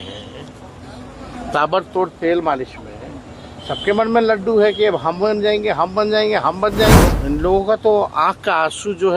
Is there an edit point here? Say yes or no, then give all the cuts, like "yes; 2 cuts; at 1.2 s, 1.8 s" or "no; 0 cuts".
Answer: yes; 1 cut; at 7.1 s